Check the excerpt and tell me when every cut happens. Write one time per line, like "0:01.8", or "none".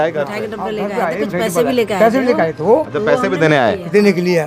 none